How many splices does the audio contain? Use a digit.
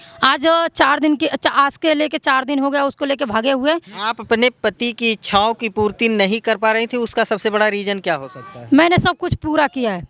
1